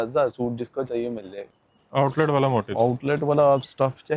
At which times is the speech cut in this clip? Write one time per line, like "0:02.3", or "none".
0:01.4